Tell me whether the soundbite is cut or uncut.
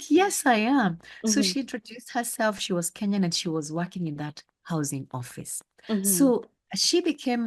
uncut